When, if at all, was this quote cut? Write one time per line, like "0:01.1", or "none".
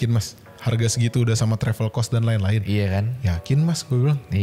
none